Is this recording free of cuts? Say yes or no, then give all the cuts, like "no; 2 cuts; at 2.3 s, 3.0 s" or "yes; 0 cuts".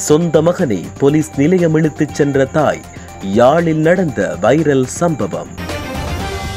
yes; 0 cuts